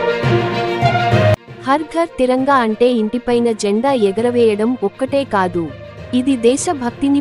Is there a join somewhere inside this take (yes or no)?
yes